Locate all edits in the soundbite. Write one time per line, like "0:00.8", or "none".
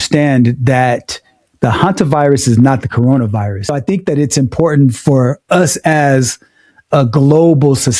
0:03.7